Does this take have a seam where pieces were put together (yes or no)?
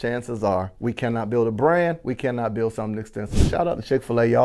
no